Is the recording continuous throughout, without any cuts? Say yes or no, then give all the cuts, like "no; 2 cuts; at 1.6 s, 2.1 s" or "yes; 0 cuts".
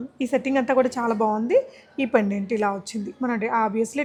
yes; 0 cuts